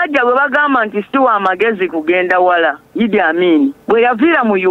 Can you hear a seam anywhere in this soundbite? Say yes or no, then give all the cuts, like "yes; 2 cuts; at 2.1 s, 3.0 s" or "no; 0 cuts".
yes; 1 cut; at 3.8 s